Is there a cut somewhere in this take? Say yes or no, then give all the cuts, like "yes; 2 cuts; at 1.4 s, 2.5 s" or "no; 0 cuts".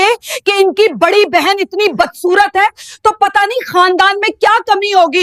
no; 0 cuts